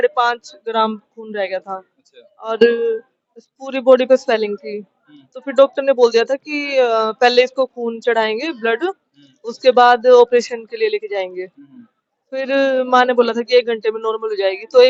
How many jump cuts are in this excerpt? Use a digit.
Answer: 0